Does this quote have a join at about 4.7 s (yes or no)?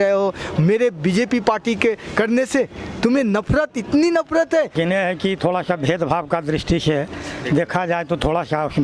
yes